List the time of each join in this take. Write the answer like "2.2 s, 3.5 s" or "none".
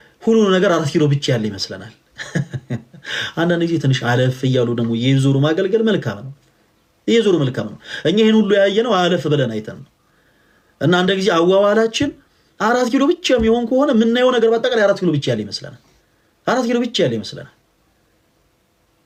none